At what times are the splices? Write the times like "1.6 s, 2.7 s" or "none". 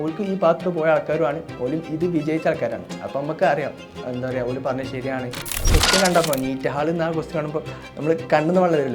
5.6 s